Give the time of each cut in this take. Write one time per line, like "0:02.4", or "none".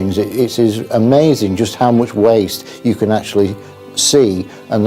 none

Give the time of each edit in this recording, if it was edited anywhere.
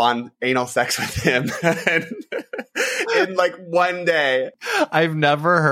0:04.6

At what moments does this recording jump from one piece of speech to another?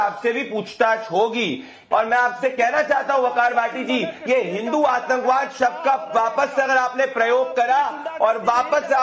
0:01.7

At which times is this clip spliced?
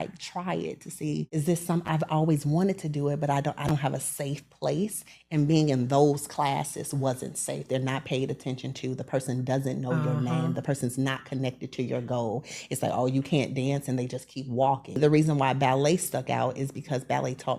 0:01.3
0:15.0

